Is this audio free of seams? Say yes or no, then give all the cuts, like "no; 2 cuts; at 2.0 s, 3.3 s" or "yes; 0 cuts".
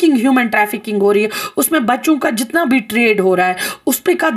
yes; 0 cuts